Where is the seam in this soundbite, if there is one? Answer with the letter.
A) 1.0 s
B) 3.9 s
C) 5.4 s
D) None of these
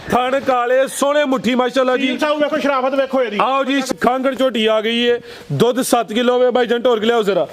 B